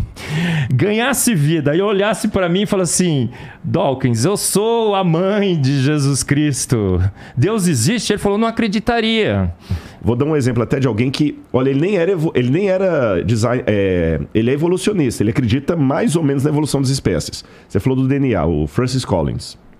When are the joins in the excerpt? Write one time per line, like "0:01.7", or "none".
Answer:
0:09.8